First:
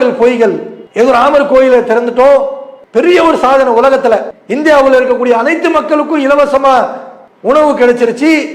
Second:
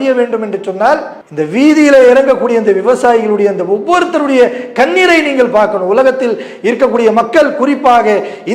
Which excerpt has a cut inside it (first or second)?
second